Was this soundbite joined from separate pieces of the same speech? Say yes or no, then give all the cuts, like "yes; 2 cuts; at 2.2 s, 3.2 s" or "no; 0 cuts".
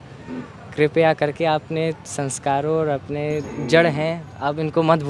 yes; 1 cut; at 3.5 s